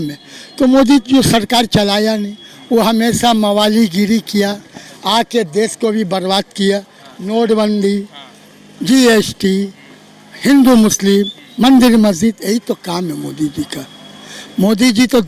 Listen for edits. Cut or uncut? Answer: uncut